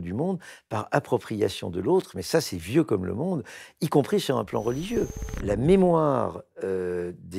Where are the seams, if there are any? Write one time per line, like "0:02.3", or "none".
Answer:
0:05.4